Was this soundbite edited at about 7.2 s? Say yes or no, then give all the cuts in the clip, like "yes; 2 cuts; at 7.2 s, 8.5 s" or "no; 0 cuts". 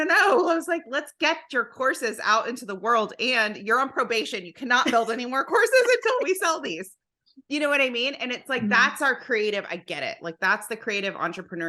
no; 0 cuts